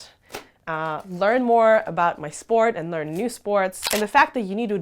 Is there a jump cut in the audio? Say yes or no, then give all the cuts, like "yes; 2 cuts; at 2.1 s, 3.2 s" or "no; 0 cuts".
yes; 1 cut; at 3.8 s